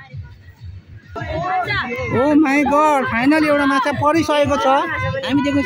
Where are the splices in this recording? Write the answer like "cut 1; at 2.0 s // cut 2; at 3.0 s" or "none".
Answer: cut 1; at 1.2 s